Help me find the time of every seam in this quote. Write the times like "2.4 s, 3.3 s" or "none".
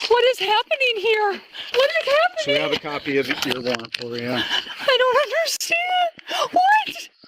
1.5 s

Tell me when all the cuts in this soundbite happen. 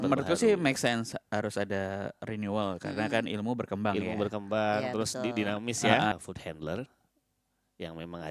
6.1 s

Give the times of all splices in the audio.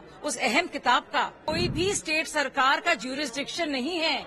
1.4 s

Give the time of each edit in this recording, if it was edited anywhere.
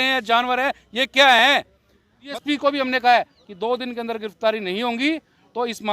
2.3 s

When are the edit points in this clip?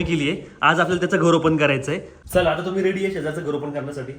2.1 s

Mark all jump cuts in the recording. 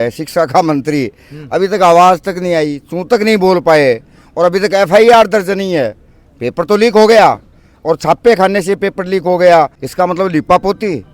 9.8 s

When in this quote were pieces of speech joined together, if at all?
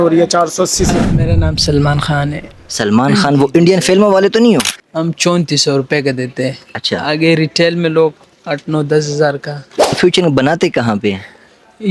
1.4 s, 4.8 s, 10.0 s

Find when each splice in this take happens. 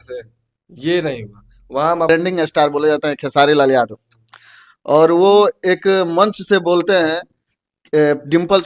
2.1 s

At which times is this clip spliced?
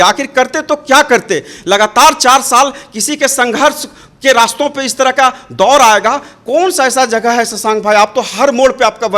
none

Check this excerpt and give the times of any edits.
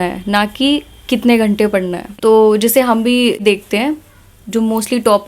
2.1 s, 3.4 s

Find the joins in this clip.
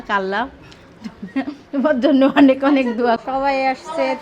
3.2 s

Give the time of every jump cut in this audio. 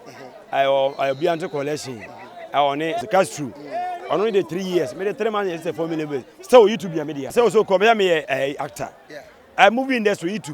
3.0 s, 7.3 s

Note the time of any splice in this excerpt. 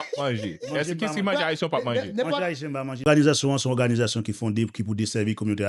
3.0 s

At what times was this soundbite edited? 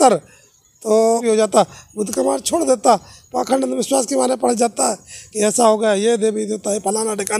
1.2 s

